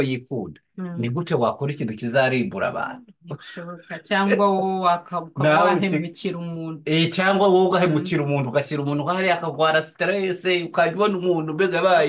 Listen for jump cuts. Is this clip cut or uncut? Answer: uncut